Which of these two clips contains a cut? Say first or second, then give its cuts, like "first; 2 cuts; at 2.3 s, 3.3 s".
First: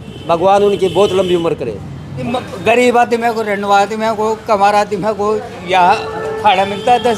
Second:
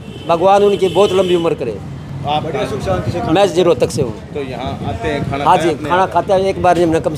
first; 1 cut; at 2.2 s